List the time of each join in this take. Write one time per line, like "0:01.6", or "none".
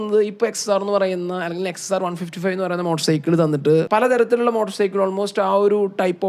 0:03.9